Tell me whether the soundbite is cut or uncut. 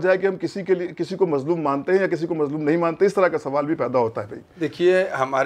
uncut